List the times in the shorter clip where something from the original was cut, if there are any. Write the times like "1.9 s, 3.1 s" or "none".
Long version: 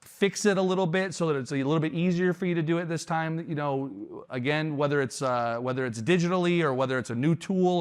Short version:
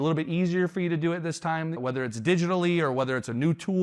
1.8 s